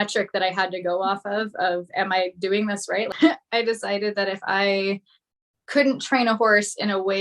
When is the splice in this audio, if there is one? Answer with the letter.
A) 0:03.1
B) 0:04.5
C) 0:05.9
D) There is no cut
A